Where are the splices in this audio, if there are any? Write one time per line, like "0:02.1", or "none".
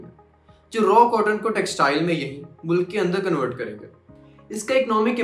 none